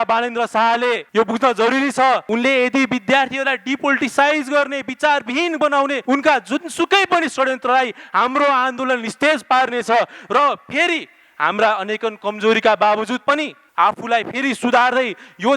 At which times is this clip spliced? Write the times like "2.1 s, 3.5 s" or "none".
1.0 s, 2.2 s, 6.0 s, 13.6 s